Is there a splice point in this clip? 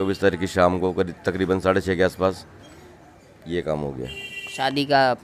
no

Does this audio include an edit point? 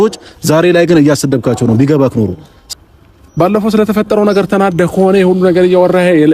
yes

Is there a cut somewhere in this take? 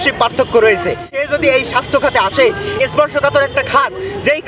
yes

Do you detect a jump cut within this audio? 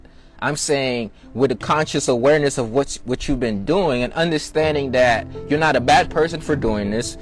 no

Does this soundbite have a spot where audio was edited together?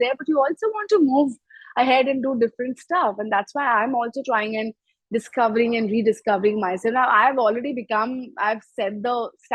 no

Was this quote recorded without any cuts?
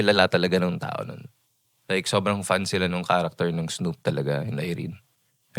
yes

